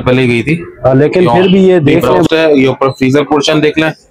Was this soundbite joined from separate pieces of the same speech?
yes; 1 cut; at 2.3 s

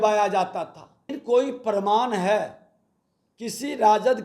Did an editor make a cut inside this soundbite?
yes; 1 cut; at 1.1 s

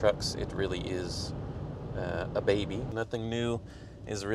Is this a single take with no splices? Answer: no; 1 cut; at 2.9 s

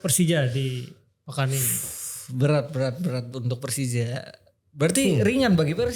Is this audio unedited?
yes; 0 cuts

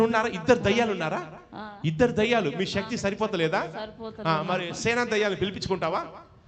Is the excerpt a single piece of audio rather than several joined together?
yes; 0 cuts

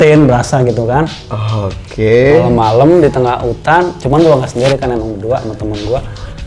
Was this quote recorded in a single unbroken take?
yes; 0 cuts

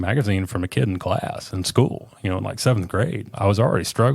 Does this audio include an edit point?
yes; 1 cut; at 3.3 s

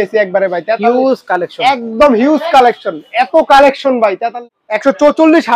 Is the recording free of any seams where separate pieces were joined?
no; 1 cut; at 4.3 s

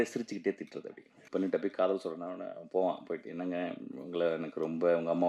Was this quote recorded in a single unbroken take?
no; 1 cut; at 1.2 s

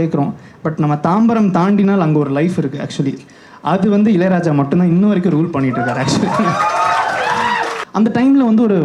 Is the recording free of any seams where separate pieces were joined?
no; 1 cut; at 7.7 s

